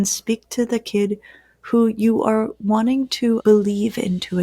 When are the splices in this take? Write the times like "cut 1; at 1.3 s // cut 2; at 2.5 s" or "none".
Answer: cut 1; at 3.4 s